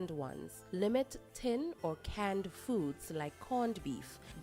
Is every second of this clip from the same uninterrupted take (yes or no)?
yes